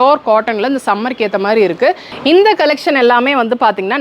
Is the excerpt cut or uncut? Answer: cut